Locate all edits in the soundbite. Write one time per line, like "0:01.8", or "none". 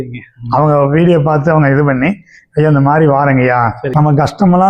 0:03.8